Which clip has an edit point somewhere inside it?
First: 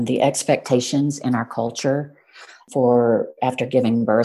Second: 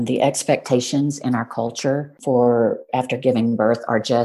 second; 1 cut; at 2.1 s

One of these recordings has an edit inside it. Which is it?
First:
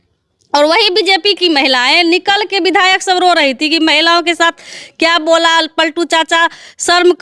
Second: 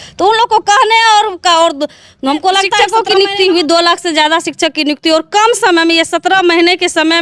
second; 1 cut; at 2.7 s

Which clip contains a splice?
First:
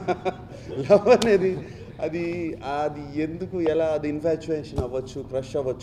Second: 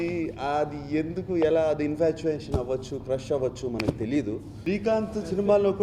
second; 1 cut; at 4.5 s

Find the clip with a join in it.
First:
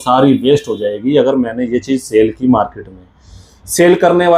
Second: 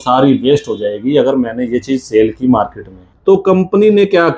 second; 1 cut; at 3.0 s

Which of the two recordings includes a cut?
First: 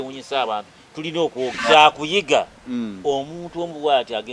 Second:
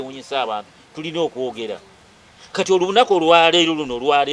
first; 1 cut; at 1.6 s

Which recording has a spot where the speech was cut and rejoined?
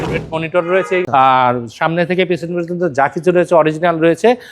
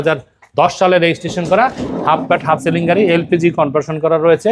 first; 1 cut; at 1.0 s

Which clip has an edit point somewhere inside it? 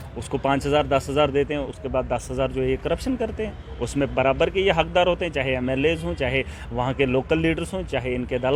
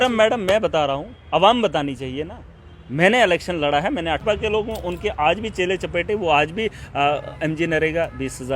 second; 1 cut; at 4.2 s

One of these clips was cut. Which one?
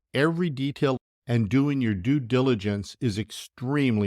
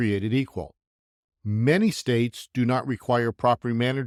first; 1 cut; at 1.0 s

